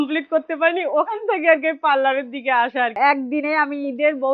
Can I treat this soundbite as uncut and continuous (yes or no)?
no